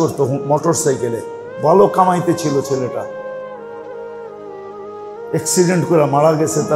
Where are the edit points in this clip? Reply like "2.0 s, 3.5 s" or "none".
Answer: 3.4 s, 5.0 s